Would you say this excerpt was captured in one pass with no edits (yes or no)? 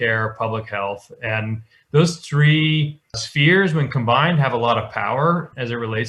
yes